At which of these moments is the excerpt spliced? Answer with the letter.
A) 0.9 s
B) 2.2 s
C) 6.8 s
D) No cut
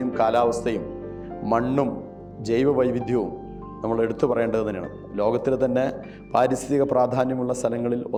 D